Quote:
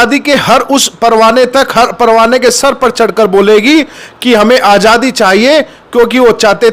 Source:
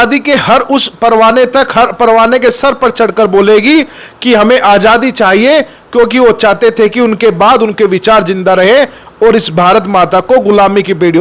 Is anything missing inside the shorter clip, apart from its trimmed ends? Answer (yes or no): no